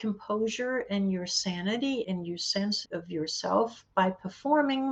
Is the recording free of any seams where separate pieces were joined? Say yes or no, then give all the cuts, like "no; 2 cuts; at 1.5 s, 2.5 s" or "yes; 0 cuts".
yes; 0 cuts